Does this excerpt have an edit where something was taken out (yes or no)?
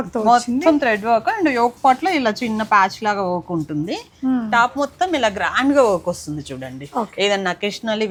no